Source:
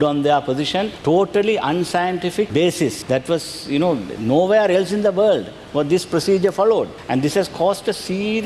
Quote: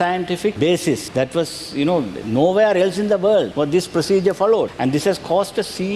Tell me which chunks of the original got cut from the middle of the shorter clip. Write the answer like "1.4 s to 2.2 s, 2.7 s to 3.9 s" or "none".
5.4 s to 5.7 s, 6.9 s to 7.0 s